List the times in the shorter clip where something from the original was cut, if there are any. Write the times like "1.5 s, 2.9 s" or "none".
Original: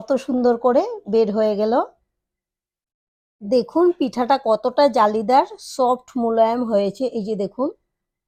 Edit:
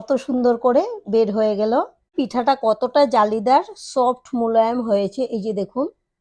2.1 s